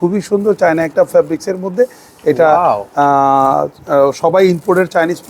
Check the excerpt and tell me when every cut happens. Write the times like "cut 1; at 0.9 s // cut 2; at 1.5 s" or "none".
none